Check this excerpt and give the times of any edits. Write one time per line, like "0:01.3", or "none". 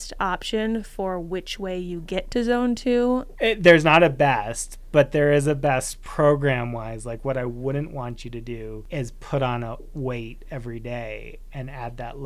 0:03.3
0:06.0
0:08.8